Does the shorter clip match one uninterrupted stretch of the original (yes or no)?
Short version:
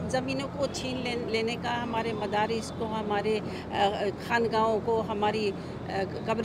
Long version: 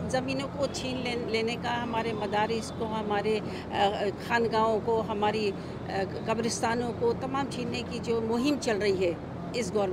yes